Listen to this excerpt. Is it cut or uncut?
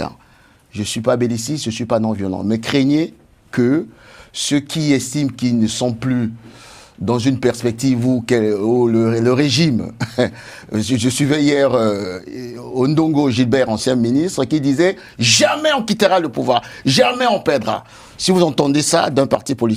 uncut